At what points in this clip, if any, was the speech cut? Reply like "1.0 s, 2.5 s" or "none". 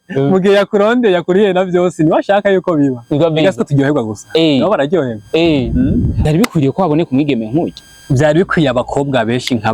6.1 s